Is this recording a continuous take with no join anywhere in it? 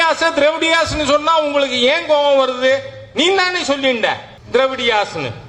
no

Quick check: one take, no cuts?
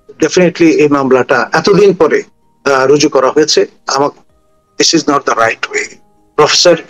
no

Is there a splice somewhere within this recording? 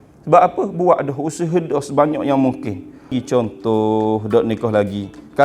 yes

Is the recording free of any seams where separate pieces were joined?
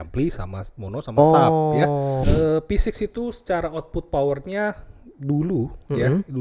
no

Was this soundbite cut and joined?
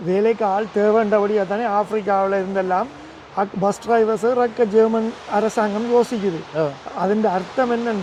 no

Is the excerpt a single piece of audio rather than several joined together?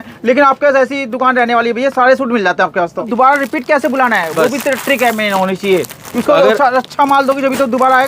no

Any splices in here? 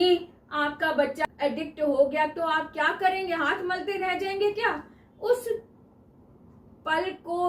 yes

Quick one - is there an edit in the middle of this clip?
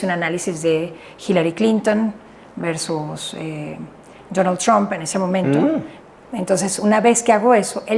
yes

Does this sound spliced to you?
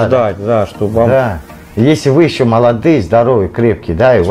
no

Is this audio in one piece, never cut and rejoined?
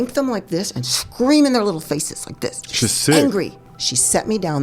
no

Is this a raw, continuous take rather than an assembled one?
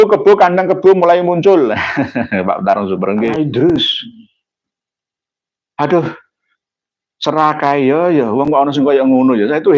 no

